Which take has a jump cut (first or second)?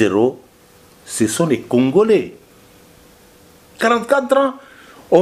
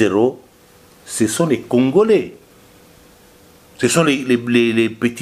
first